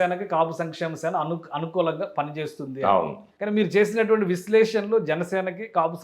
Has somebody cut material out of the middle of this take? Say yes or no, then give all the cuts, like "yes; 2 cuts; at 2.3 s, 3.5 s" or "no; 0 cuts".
yes; 1 cut; at 3.2 s